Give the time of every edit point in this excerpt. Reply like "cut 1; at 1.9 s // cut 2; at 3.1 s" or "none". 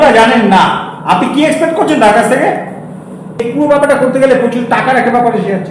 cut 1; at 3.4 s